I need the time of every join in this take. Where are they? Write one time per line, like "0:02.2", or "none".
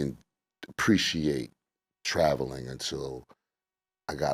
none